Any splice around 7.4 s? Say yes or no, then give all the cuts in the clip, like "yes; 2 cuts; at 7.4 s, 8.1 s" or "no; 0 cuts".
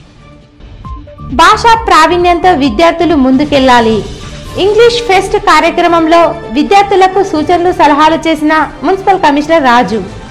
no; 1 cut; at 1.2 s